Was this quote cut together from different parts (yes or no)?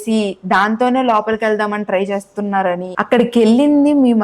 yes